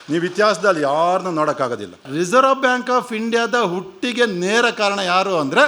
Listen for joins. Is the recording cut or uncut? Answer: cut